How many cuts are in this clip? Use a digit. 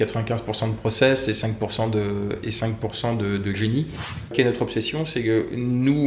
1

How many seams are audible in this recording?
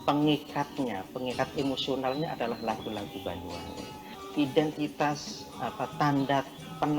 1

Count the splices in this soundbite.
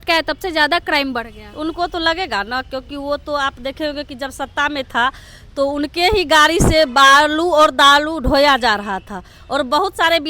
0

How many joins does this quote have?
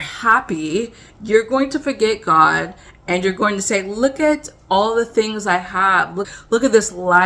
1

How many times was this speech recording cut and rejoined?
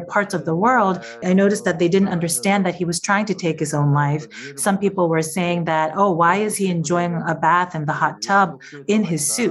1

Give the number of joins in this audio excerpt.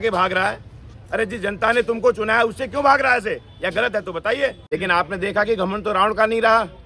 1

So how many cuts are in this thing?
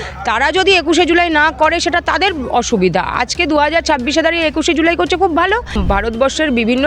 1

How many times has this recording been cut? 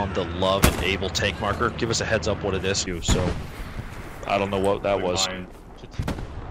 1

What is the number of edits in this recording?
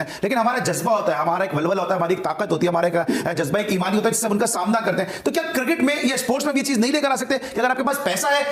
0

